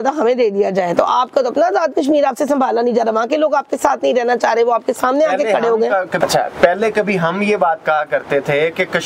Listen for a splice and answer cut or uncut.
uncut